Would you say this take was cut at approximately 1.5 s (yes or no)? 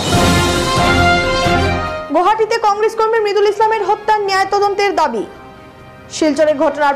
yes